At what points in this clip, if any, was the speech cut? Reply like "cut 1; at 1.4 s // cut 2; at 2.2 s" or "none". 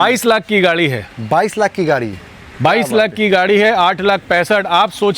none